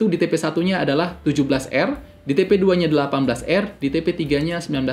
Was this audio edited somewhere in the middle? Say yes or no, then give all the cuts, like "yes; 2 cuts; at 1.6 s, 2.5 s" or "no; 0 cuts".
no; 0 cuts